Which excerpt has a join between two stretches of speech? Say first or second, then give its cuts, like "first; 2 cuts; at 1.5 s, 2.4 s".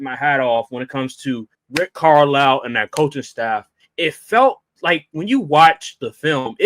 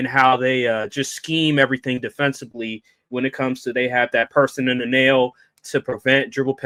first; 2 cuts; at 1.6 s, 3.8 s